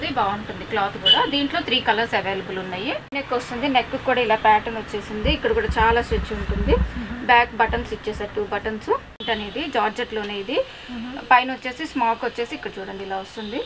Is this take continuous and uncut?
no; 2 cuts; at 3.1 s, 9.2 s

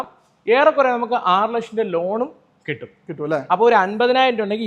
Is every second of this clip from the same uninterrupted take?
yes; 0 cuts

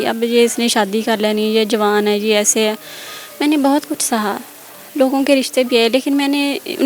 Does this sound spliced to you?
no; 0 cuts

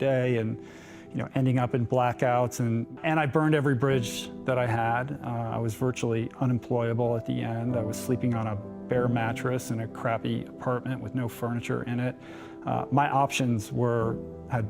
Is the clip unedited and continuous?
no; 1 cut; at 3.0 s

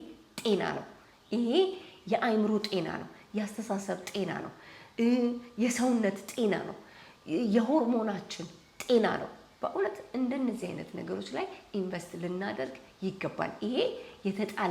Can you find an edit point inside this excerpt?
no; 0 cuts

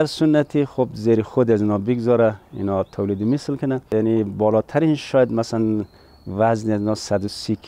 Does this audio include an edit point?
yes; 1 cut; at 3.8 s

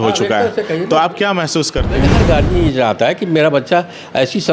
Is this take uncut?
no; 1 cut; at 2.1 s

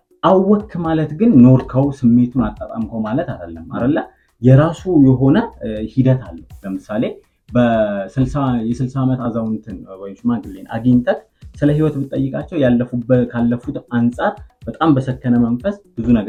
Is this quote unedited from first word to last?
yes; 0 cuts

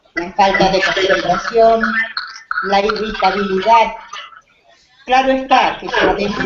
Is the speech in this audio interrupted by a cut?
yes; 1 cut; at 5.2 s

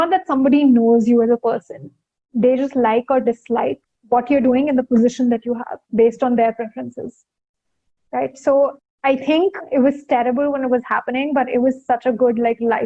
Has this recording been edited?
yes; 2 cuts; at 3.9 s, 9.3 s

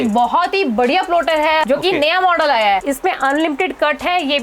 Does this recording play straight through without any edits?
no; 2 cuts; at 1.6 s, 2.9 s

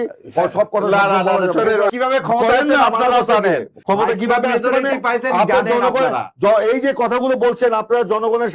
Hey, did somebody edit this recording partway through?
yes; 2 cuts; at 1.9 s, 3.7 s

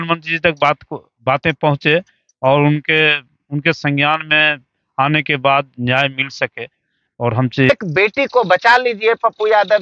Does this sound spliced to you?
yes; 1 cut; at 7.7 s

